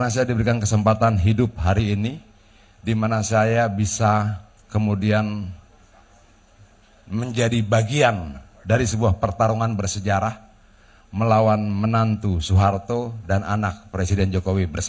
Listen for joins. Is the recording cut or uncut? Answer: uncut